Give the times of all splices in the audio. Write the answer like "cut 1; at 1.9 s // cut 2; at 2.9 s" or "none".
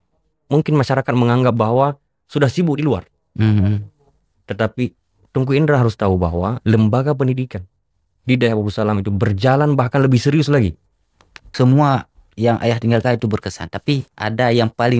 cut 1; at 11.4 s